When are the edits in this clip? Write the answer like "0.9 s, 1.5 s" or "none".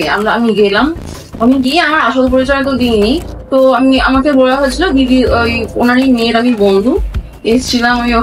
none

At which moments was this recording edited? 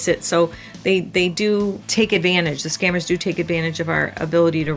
1.8 s

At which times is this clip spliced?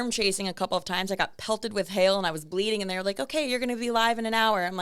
none

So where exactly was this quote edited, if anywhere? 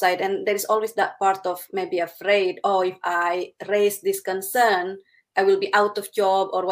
none

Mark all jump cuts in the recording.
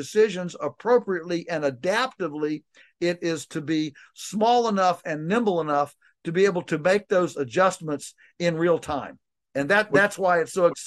none

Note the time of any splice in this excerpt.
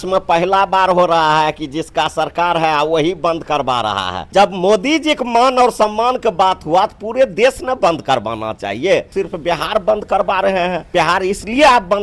4.1 s, 9.1 s, 10.9 s

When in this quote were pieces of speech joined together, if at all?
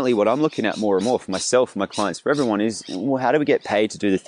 none

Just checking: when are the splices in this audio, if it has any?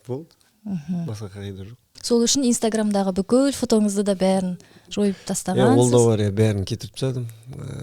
1.9 s

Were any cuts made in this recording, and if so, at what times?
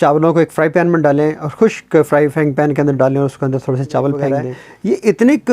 4.4 s

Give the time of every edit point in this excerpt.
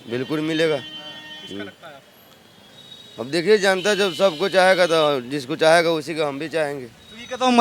none

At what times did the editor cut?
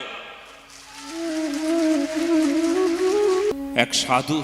3.5 s

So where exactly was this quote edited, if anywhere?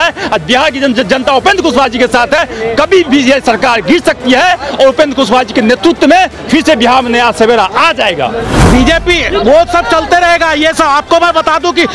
8.6 s

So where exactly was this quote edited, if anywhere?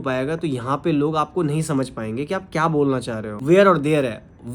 3.3 s

